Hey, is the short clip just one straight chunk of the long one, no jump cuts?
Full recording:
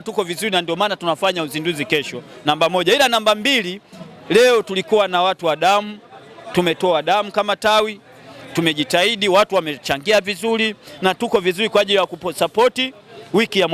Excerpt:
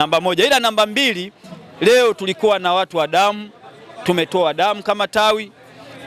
yes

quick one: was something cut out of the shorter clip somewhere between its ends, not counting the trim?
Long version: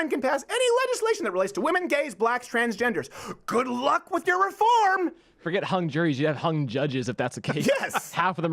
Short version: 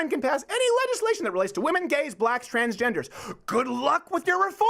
no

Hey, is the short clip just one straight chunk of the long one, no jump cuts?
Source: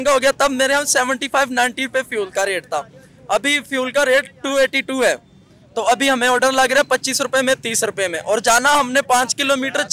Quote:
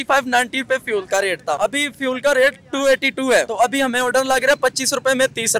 no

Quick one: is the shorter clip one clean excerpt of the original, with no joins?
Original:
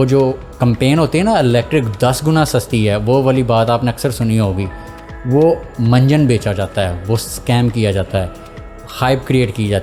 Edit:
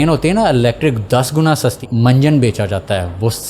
no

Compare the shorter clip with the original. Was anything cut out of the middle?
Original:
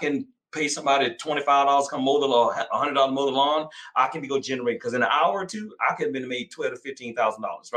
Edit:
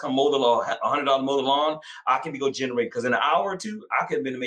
no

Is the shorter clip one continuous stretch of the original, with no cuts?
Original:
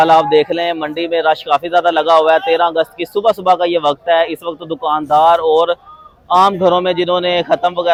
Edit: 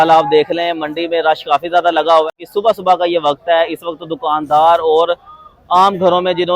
no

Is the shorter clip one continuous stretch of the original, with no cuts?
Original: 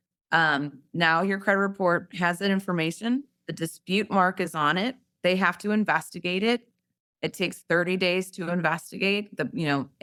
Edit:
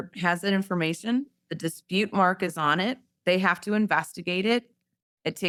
yes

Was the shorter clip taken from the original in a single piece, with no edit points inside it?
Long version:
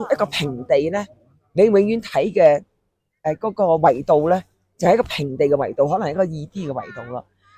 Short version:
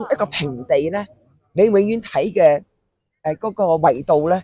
yes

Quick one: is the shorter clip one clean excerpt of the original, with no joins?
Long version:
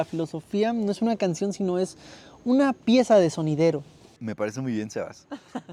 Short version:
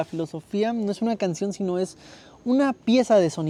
yes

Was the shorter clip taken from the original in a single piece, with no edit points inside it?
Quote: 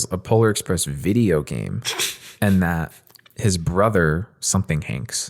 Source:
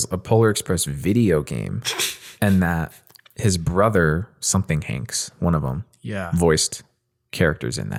yes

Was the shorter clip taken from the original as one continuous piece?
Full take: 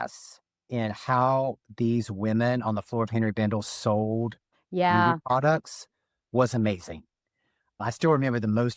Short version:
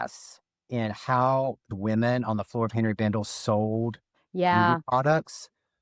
no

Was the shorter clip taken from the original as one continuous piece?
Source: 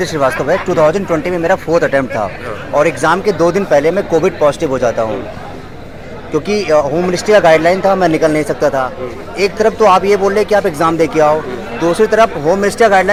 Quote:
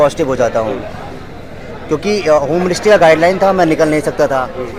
yes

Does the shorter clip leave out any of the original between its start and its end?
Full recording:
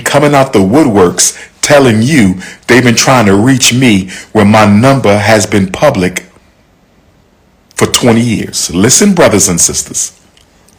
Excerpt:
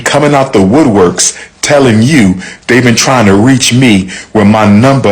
no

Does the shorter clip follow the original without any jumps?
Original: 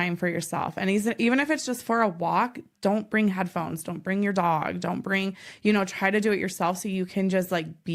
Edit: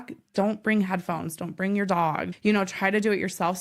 no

